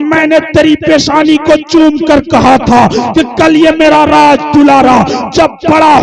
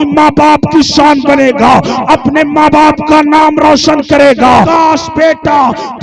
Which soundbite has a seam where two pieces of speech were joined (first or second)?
second